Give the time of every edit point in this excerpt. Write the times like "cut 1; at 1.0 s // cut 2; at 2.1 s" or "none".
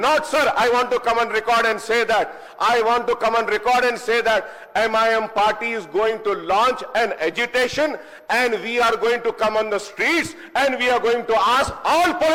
none

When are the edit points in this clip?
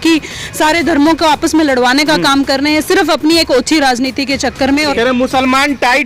cut 1; at 4.9 s

